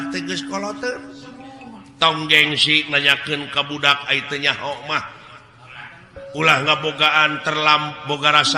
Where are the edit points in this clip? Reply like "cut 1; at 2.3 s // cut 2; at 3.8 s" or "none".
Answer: none